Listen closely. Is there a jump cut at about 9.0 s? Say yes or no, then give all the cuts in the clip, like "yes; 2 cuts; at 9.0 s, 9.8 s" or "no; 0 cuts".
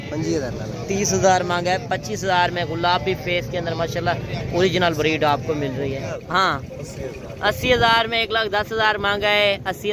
no; 1 cut; at 6.1 s